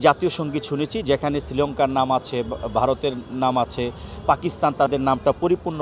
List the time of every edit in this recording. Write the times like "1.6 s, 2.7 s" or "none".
none